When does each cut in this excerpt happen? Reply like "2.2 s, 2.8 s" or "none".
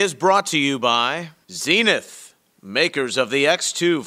1.3 s